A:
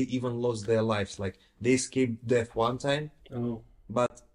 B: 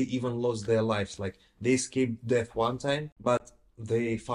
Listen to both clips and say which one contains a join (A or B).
B